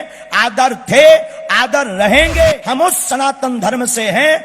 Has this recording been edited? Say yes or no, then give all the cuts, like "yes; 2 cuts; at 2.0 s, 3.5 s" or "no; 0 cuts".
yes; 1 cut; at 2.6 s